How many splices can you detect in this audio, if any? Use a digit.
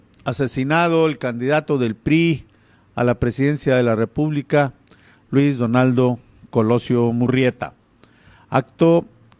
1